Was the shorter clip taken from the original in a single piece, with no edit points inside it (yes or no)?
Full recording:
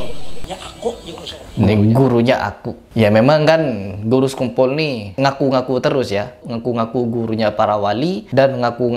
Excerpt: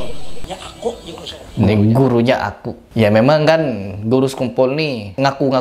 yes